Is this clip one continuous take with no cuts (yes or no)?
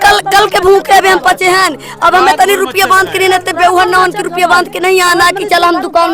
yes